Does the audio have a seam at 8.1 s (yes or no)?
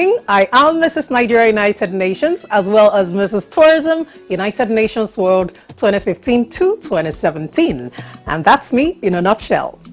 yes